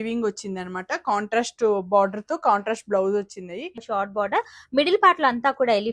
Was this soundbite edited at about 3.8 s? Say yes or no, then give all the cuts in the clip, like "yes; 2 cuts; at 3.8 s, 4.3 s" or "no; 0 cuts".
yes; 1 cut; at 3.8 s